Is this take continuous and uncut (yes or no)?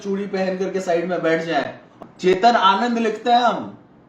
no